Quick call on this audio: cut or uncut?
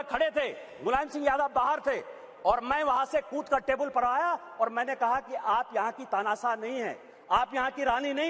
uncut